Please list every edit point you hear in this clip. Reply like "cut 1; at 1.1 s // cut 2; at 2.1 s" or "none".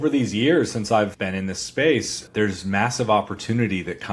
cut 1; at 1.0 s